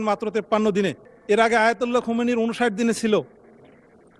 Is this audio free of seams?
no; 1 cut; at 1.1 s

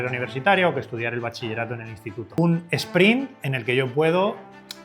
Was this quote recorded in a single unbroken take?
no; 1 cut; at 2.4 s

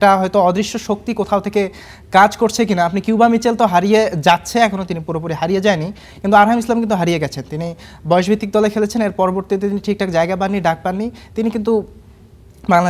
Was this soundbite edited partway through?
no; 0 cuts

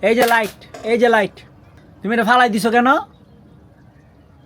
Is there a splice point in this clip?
no; 0 cuts

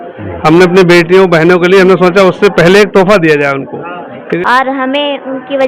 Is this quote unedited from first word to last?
no; 1 cut; at 4.2 s

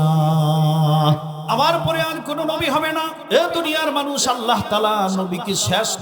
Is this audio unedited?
no; 2 cuts; at 1.3 s, 3.2 s

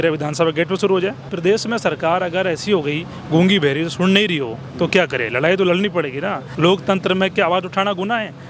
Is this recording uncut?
no; 2 cuts; at 1.3 s, 6.4 s

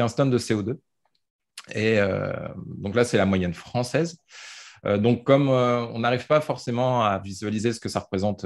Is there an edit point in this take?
yes; 1 cut; at 1.1 s

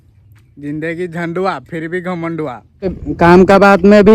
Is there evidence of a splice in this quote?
yes; 1 cut; at 2.8 s

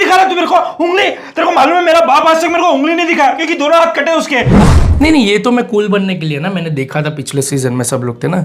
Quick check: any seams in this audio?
yes; 1 cut; at 4.6 s

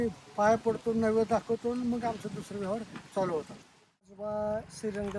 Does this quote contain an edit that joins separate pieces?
yes; 1 cut; at 4.1 s

